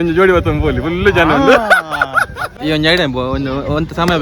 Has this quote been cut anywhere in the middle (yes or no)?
yes